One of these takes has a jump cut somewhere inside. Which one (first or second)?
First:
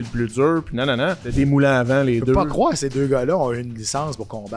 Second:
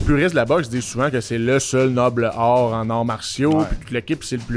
first